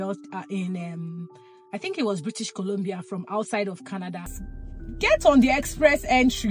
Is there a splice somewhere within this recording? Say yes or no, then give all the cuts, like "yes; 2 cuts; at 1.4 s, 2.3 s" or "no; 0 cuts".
yes; 1 cut; at 4.4 s